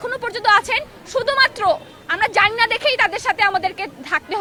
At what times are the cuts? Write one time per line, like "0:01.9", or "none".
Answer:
none